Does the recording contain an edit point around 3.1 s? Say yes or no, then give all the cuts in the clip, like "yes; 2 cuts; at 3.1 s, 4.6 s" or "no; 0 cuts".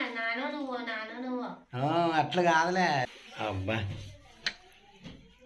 yes; 1 cut; at 3.1 s